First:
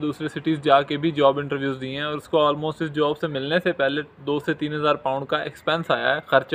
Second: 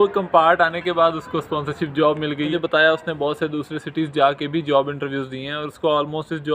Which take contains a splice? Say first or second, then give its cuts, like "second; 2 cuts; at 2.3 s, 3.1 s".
second; 1 cut; at 2.5 s